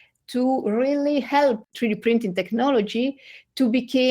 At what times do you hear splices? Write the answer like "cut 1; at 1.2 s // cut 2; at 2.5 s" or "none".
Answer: cut 1; at 1.7 s